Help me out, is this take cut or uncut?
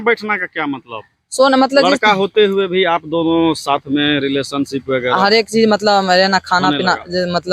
uncut